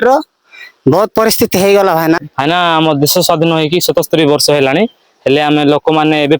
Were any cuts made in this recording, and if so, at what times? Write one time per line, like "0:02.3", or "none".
0:02.3